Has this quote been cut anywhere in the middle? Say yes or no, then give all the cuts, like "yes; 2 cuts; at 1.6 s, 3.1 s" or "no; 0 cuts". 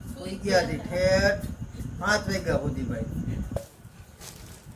yes; 1 cut; at 3.6 s